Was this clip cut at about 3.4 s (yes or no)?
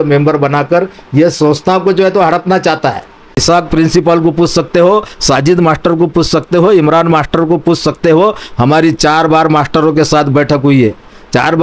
yes